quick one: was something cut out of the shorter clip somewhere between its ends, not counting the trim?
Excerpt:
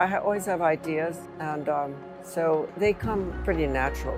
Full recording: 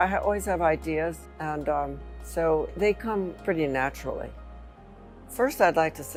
no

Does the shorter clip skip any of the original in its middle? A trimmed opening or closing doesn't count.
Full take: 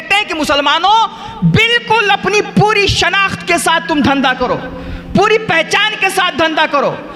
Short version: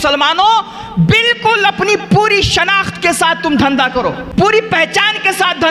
yes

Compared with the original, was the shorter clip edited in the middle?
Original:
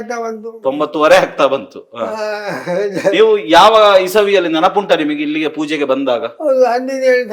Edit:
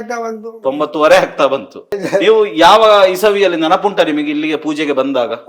yes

